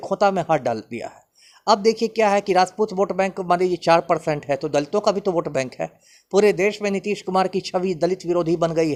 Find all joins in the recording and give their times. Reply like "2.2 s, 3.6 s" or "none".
none